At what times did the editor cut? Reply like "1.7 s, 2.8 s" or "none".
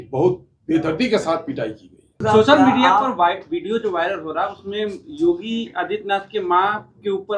2.2 s